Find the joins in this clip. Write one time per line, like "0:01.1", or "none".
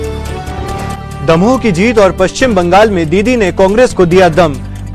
0:00.9